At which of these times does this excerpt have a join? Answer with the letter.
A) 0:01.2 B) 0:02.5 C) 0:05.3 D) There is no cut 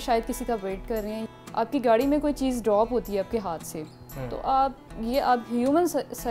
A